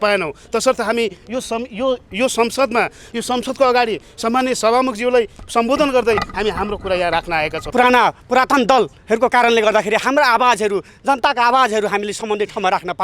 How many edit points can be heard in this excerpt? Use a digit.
1